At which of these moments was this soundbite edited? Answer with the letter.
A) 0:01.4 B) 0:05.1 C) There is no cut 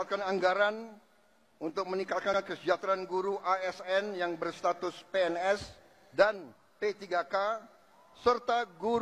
C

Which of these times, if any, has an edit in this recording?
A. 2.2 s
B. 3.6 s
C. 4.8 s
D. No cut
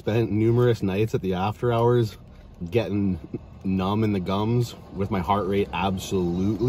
D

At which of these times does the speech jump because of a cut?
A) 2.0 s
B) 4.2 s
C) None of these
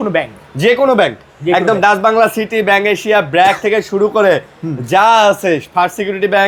C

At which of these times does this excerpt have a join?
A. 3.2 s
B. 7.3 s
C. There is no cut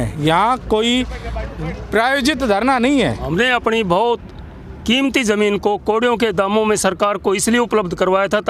A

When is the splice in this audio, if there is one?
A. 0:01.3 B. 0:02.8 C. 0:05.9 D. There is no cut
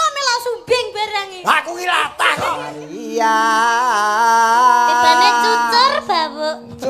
B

